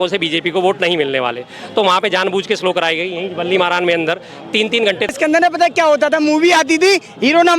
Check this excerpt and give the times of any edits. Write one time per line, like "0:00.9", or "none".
0:05.1